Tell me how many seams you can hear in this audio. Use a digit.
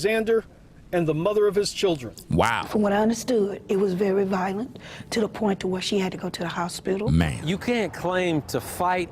2